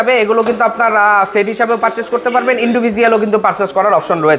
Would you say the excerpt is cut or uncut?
uncut